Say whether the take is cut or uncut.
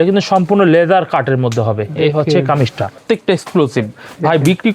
cut